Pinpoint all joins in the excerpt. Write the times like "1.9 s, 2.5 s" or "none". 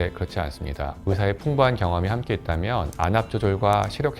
1.0 s, 2.9 s